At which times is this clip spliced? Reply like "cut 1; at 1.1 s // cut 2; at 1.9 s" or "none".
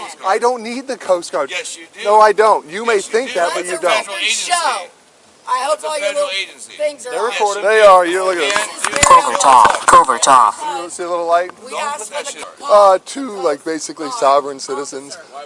none